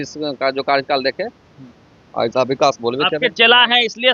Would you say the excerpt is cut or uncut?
uncut